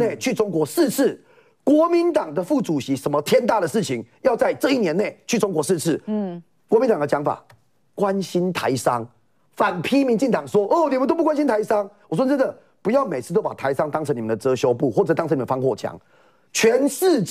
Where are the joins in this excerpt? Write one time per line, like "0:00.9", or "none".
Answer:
none